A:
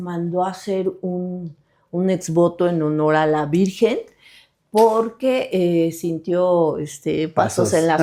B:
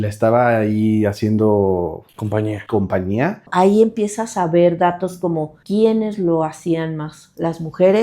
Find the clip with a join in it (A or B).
B